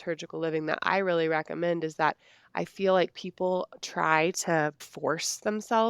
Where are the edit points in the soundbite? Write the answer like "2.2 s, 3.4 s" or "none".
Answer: 4.9 s